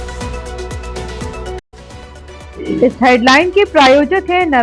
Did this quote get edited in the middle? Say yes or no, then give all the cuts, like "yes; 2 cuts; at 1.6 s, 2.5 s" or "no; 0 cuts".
yes; 1 cut; at 1.6 s